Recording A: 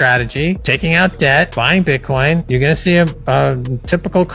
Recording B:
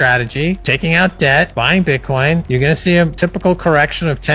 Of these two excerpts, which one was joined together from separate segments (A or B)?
B